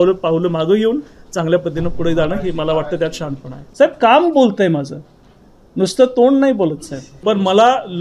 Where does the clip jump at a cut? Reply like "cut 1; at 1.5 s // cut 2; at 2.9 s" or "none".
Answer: cut 1; at 3.5 s // cut 2; at 7.1 s